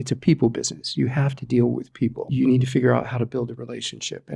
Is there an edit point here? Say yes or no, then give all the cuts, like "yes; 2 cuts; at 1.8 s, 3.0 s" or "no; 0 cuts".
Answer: yes; 1 cut; at 2.3 s